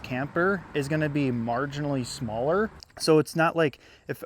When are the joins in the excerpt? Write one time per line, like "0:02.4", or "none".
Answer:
0:02.9